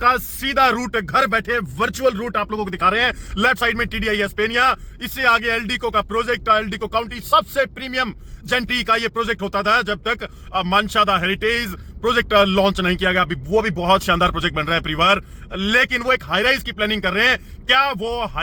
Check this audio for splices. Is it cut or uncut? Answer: uncut